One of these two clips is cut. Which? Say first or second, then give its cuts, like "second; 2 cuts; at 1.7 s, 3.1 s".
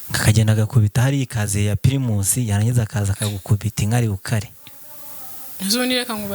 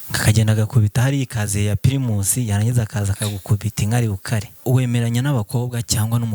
second; 1 cut; at 4.6 s